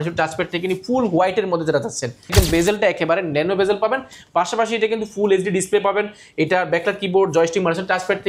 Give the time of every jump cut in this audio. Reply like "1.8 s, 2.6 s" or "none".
2.3 s

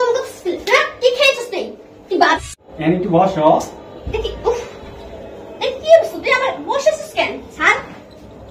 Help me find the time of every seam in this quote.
2.2 s

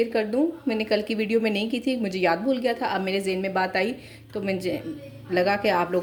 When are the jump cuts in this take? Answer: none

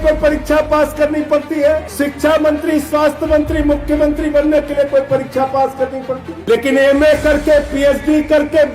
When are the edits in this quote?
1.9 s, 6.3 s

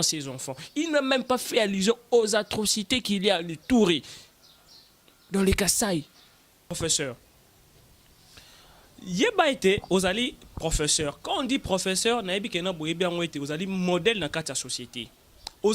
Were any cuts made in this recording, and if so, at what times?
6.7 s

